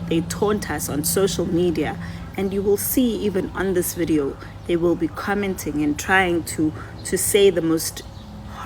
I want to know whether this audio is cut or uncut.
uncut